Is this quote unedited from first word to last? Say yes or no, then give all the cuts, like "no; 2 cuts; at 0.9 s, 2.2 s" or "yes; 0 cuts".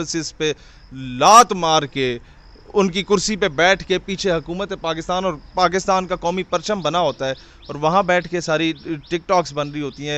yes; 0 cuts